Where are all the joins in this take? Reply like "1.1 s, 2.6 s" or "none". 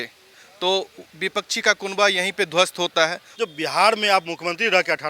3.2 s